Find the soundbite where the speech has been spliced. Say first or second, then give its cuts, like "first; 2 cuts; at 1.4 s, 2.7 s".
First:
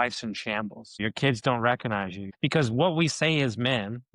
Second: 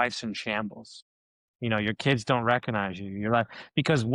first; 2 cuts; at 1.0 s, 2.2 s